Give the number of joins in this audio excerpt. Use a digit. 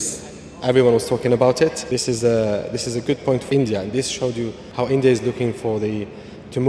3